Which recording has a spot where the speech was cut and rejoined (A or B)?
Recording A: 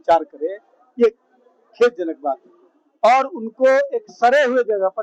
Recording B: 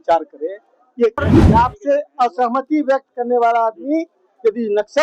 B